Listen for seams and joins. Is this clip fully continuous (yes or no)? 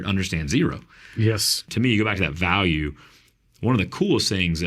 no